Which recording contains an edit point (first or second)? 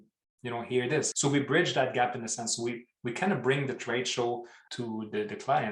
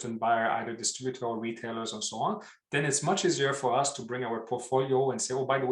first